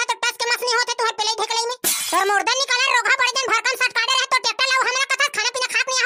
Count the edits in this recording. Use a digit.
0